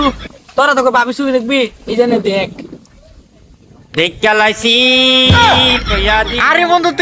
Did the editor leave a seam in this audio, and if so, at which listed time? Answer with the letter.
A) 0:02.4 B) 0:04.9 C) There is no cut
C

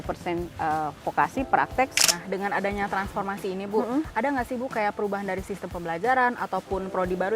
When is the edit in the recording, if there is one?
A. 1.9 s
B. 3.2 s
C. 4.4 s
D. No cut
A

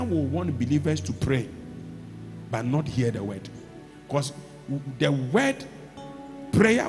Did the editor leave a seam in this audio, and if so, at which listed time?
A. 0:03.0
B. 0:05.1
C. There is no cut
C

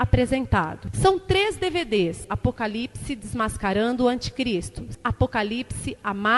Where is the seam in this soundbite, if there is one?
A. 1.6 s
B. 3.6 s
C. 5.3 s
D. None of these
D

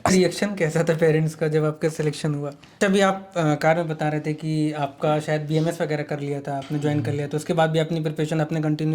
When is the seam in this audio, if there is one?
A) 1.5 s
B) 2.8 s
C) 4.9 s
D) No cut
B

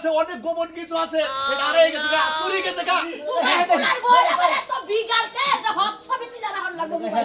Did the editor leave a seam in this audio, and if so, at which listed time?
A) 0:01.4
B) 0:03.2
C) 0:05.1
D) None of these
B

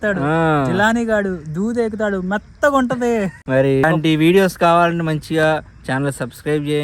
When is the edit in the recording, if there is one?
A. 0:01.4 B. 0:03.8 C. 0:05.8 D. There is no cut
B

